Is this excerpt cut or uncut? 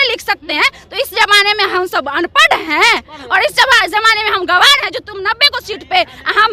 uncut